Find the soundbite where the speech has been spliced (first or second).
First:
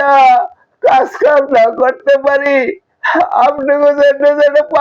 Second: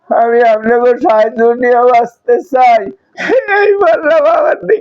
second